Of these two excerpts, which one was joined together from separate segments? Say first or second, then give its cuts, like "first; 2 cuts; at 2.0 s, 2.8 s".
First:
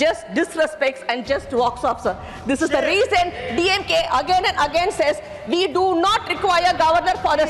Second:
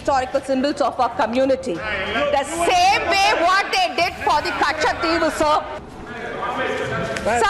second; 1 cut; at 5.8 s